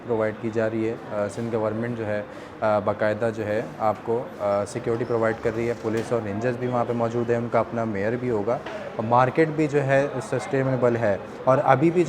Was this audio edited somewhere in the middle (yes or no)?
no